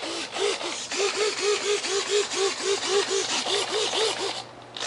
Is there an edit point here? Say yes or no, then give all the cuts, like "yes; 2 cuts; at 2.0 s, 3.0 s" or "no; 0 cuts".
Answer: yes; 1 cut; at 2.8 s